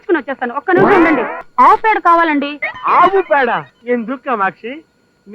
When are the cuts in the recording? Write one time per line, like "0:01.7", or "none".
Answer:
0:01.4
0:03.7